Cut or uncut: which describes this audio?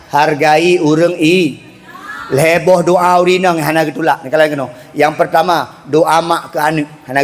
uncut